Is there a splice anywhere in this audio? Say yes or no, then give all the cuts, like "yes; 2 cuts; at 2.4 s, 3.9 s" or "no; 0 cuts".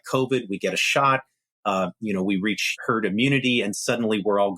yes; 1 cut; at 2.7 s